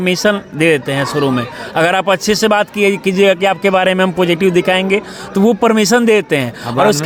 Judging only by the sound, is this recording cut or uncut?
uncut